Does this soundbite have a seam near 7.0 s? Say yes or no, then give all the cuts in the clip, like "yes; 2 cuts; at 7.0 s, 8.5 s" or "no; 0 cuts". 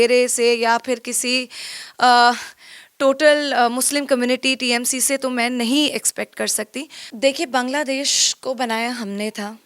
yes; 1 cut; at 7.0 s